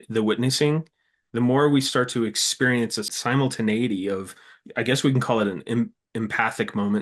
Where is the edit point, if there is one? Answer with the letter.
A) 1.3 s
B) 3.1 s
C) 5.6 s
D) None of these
B